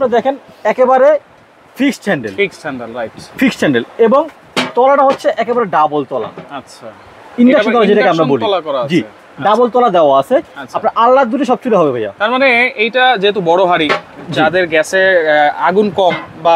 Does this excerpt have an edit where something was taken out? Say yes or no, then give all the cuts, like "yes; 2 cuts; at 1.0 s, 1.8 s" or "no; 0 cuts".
no; 0 cuts